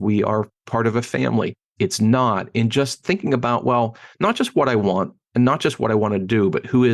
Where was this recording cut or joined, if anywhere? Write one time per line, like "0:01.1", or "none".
0:01.6